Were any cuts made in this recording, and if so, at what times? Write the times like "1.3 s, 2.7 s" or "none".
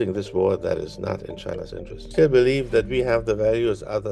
2.0 s